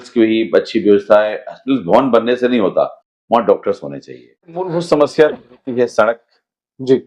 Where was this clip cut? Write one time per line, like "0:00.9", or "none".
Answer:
0:04.6